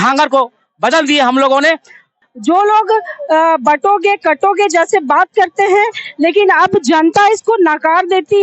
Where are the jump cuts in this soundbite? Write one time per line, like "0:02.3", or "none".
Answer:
0:02.3